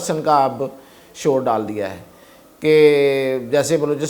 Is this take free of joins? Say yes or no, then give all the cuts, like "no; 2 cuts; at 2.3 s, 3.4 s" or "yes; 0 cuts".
yes; 0 cuts